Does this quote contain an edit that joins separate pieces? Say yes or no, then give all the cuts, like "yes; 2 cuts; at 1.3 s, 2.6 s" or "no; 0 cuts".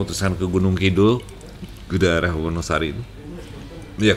no; 0 cuts